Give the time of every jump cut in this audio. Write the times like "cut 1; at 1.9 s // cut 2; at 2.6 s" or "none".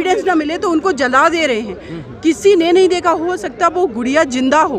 none